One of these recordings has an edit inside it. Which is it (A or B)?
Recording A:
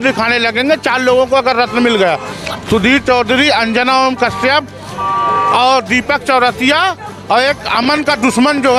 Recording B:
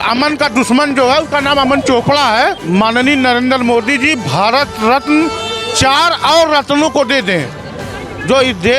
B